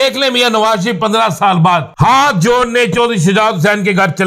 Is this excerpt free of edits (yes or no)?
no